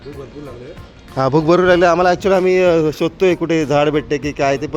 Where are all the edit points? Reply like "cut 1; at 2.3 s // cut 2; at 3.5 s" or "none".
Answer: none